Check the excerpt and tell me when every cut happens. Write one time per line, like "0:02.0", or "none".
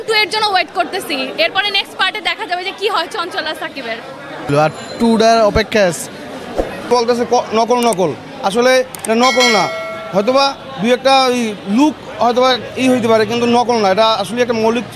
0:04.5
0:06.8